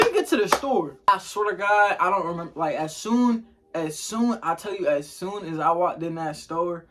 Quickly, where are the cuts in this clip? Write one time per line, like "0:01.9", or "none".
0:01.1